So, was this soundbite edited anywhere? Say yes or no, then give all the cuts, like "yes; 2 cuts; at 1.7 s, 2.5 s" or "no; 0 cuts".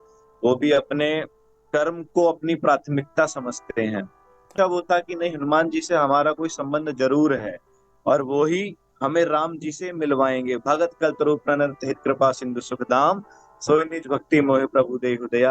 yes; 1 cut; at 4.4 s